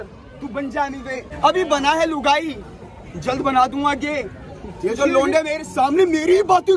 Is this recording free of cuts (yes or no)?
no